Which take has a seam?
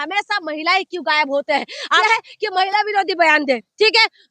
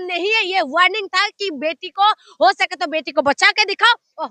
first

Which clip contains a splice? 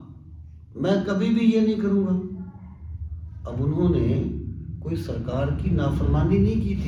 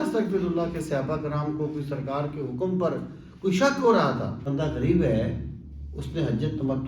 second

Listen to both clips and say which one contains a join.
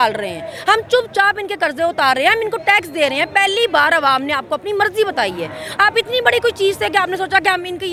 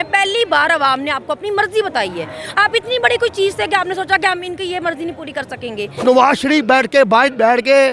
second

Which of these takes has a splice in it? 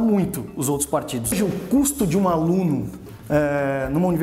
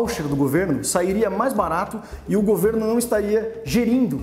first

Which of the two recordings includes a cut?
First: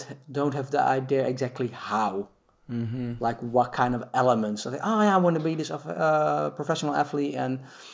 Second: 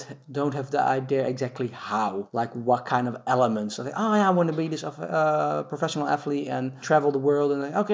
second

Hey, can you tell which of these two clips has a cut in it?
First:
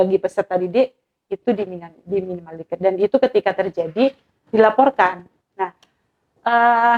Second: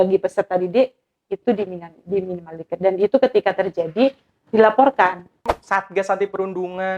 second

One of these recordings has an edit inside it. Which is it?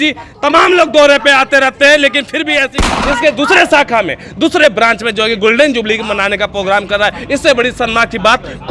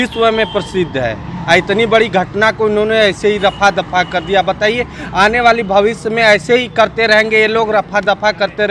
first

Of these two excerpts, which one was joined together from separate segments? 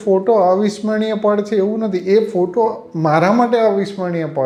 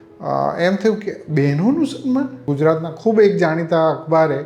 second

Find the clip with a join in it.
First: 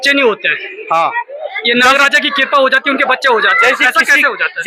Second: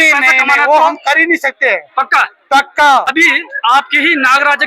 second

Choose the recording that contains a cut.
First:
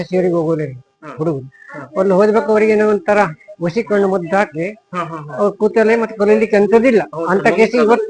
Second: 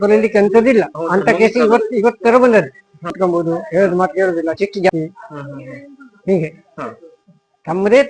second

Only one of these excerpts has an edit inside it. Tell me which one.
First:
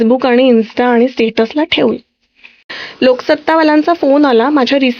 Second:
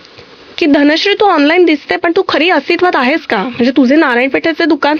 first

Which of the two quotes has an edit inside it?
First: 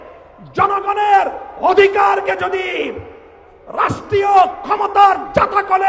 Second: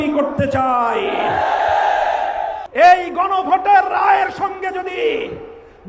second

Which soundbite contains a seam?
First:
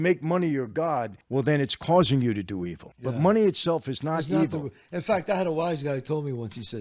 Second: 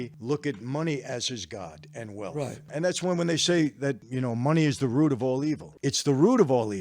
second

